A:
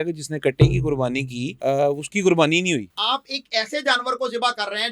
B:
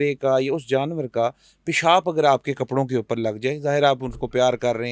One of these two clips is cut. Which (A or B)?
A